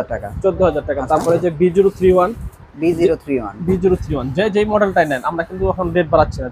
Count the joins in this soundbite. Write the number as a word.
zero